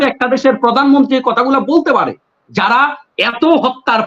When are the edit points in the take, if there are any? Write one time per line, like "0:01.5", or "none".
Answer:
0:02.4